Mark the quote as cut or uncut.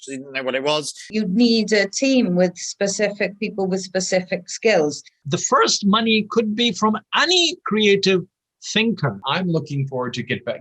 cut